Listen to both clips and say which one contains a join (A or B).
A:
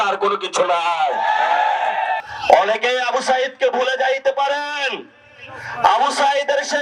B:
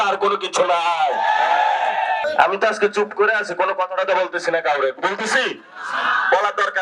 A